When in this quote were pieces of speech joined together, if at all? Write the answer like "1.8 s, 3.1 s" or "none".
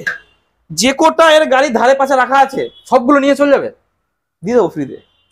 none